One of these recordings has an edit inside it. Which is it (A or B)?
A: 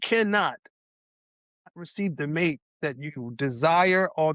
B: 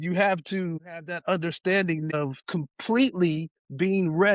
B